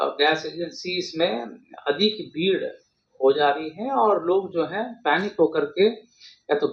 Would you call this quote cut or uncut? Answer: uncut